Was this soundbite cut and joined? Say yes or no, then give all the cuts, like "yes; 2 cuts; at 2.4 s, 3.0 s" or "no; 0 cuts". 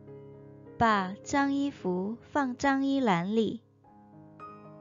yes; 2 cuts; at 0.8 s, 3.6 s